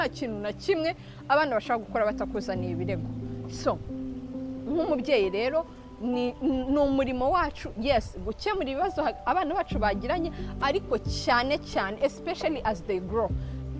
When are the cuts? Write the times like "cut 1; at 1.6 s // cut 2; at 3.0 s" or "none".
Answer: none